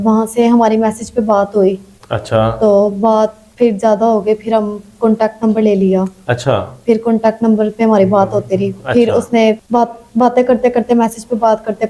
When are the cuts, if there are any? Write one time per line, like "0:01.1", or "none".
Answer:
none